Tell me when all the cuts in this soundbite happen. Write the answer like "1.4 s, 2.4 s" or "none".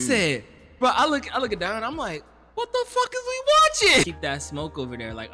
4.1 s